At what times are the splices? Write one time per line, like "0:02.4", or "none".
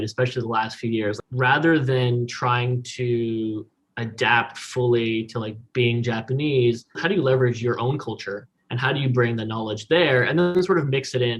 0:01.2
0:07.0
0:08.6
0:10.5

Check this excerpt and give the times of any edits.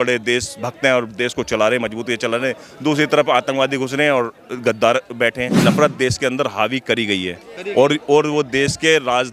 0:05.5

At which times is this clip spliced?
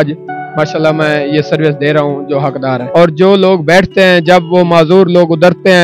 0:02.8

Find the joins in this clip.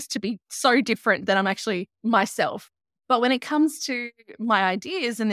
0:01.9
0:02.7

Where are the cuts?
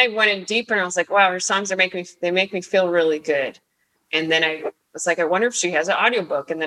0:04.0

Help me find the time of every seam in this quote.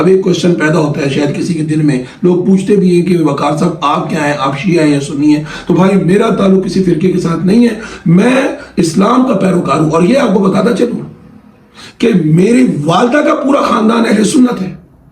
none

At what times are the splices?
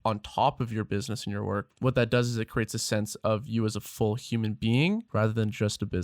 0:01.7
0:05.1

